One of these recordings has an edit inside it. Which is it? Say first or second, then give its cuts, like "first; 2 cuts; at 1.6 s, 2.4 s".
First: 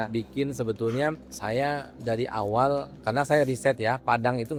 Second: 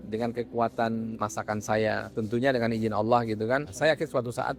second; 1 cut; at 3.7 s